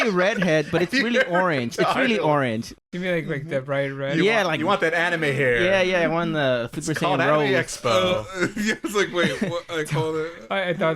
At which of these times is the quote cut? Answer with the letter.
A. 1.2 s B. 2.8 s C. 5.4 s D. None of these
B